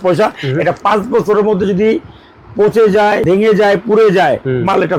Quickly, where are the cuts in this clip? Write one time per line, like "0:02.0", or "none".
0:03.2